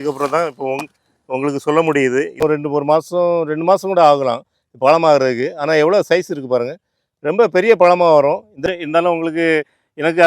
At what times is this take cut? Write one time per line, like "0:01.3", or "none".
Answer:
0:02.4
0:08.6